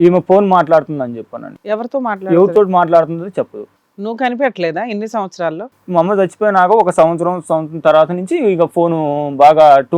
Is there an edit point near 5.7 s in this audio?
yes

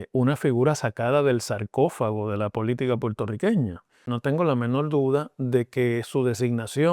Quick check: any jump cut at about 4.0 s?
yes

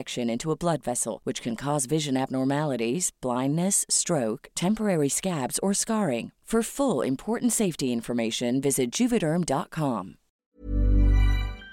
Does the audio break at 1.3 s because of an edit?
no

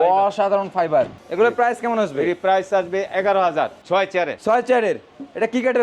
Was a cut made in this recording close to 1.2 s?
yes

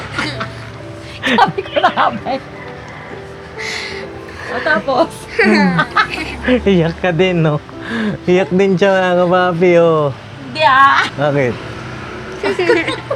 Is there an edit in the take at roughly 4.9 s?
no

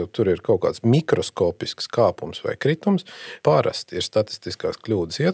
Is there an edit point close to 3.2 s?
yes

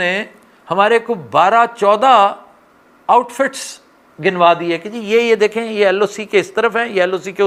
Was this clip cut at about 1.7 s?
no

